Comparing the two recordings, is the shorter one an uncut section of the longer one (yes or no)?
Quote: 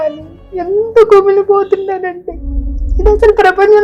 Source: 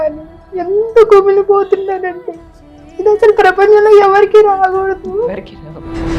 yes